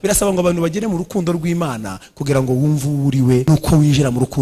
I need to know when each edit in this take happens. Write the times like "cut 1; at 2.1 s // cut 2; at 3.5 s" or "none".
cut 1; at 3.4 s

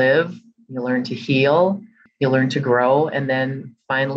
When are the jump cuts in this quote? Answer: cut 1; at 2.0 s

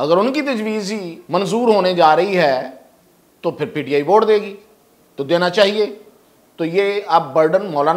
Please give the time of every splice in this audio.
cut 1; at 1.1 s

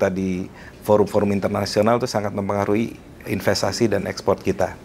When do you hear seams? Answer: none

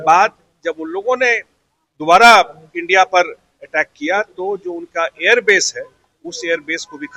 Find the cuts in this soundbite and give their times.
none

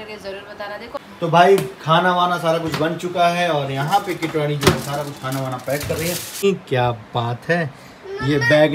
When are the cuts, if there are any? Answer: cut 1; at 1.0 s // cut 2; at 6.4 s

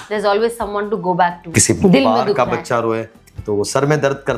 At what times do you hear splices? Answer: cut 1; at 1.4 s

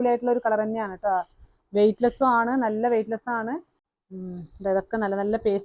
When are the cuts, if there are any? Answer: cut 1; at 3.8 s

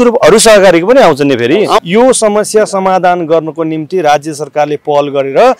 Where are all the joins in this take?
cut 1; at 1.8 s

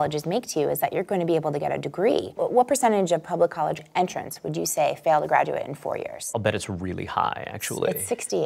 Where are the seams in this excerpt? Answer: cut 1; at 2.4 s // cut 2; at 3.8 s // cut 3; at 6.2 s

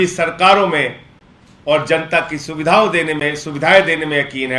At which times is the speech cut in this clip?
none

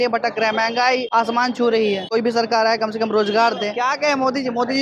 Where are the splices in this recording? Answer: cut 1; at 1.1 s // cut 2; at 2.1 s // cut 3; at 3.8 s

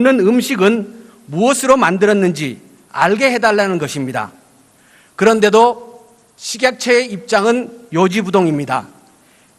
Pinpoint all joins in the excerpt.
none

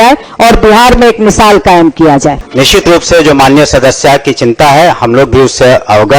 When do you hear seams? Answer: cut 1; at 2.4 s

